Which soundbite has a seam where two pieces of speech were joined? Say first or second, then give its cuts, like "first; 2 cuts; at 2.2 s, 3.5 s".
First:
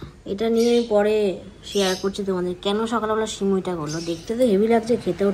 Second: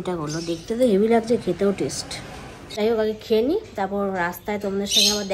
second; 1 cut; at 2.8 s